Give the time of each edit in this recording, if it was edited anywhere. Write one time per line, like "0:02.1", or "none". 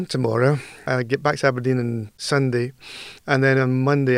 0:00.8
0:02.1